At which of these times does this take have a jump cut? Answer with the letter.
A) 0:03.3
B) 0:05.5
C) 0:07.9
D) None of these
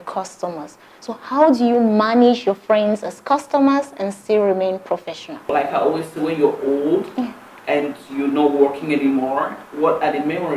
B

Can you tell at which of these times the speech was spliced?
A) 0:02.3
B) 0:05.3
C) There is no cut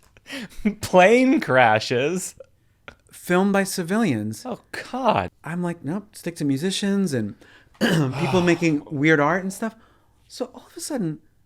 B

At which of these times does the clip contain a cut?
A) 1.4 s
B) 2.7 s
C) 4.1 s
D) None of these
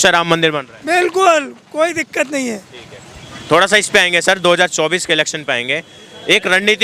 D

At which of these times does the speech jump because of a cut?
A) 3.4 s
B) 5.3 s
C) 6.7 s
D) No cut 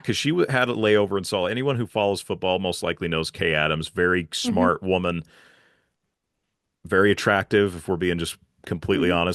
D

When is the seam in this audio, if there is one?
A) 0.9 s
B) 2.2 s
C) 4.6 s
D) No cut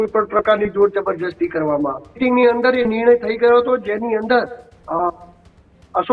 B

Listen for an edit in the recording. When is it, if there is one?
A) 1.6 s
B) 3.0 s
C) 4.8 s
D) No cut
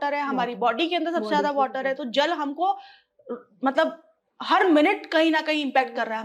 D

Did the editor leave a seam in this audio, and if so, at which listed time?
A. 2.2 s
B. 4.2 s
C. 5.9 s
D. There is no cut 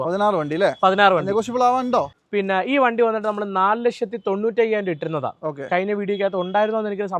A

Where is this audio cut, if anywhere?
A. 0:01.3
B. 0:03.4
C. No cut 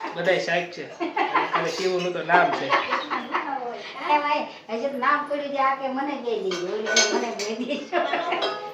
C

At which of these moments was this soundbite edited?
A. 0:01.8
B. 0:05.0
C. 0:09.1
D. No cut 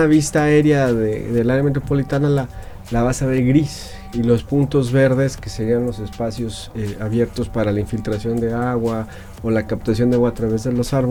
D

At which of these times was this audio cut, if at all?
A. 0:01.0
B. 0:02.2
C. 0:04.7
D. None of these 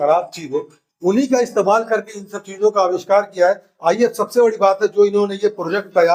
D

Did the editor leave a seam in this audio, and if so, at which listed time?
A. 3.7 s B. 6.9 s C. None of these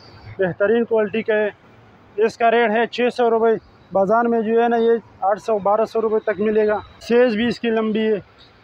B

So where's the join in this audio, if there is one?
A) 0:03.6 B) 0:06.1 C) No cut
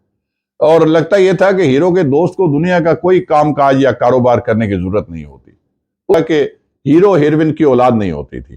B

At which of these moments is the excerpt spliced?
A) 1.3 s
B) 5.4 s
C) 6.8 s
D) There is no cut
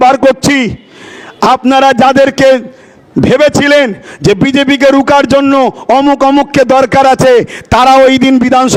D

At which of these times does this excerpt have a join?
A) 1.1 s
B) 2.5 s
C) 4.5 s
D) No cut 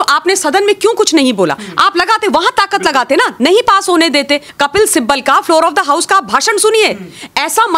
C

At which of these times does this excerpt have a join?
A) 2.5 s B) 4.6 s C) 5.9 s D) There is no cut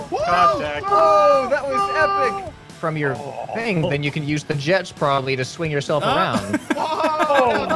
A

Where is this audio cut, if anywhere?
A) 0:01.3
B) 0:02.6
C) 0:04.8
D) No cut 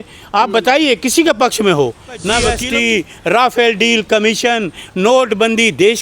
B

